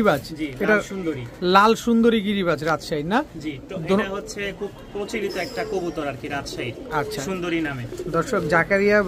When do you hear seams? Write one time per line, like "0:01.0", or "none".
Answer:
none